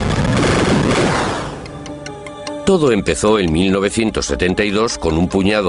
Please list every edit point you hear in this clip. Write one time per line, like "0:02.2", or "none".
0:03.2